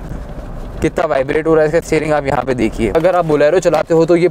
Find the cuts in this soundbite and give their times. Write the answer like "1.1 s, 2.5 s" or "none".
3.0 s